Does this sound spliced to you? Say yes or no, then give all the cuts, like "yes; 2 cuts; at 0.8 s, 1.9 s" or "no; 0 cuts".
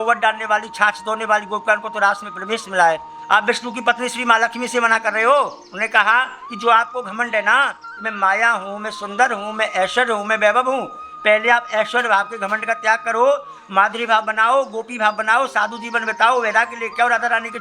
yes; 1 cut; at 3.1 s